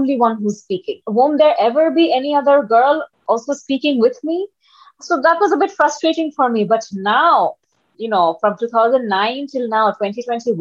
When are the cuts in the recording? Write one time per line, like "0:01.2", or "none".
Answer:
0:01.0
0:07.8